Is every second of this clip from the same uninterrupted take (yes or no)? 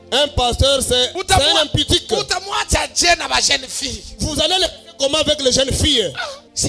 yes